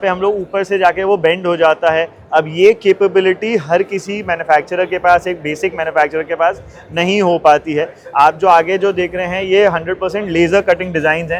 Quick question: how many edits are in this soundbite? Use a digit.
0